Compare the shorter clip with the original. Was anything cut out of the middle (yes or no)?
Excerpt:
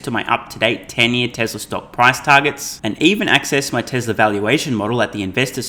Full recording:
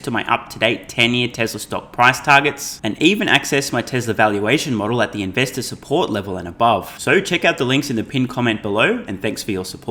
no